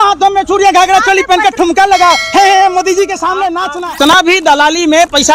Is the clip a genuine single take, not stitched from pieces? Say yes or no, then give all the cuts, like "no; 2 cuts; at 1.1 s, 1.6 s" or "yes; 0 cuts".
no; 1 cut; at 4.0 s